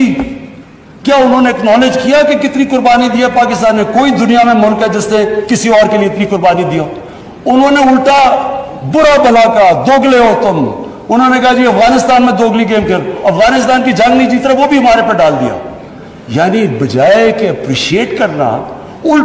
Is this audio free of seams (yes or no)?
yes